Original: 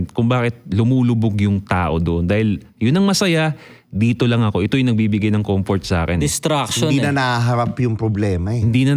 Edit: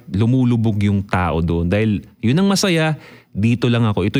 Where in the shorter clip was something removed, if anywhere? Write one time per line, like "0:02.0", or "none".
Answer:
none

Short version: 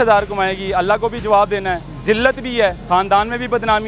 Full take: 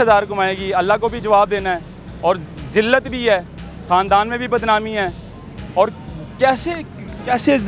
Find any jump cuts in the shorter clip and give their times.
0:01.9
0:02.8

